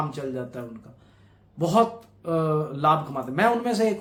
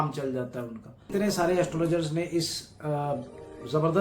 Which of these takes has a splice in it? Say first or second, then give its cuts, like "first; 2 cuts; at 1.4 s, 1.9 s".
second; 1 cut; at 1.1 s